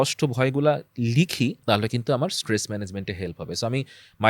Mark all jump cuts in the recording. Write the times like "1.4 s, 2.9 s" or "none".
1.6 s